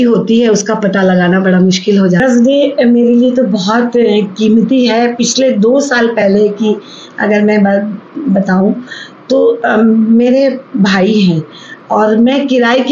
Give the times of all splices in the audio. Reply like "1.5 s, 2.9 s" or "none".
2.2 s